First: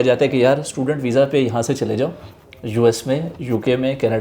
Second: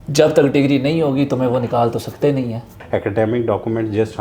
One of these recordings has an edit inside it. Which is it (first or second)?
second